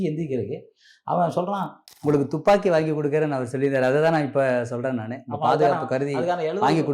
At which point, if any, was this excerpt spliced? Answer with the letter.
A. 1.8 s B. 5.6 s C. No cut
A